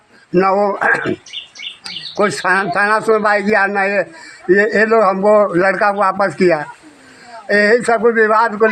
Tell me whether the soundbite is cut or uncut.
uncut